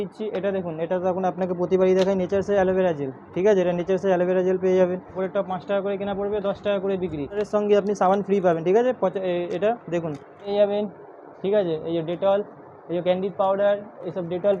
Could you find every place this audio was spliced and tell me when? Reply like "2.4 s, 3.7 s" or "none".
5.1 s, 7.4 s, 10.5 s